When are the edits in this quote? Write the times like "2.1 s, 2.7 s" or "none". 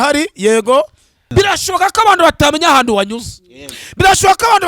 1.3 s